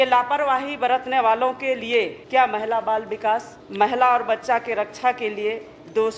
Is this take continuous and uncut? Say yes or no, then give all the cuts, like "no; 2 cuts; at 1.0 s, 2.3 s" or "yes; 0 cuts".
no; 2 cuts; at 2.2 s, 3.6 s